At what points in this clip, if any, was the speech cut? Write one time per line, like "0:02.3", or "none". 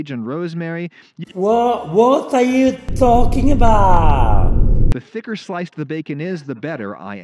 0:04.8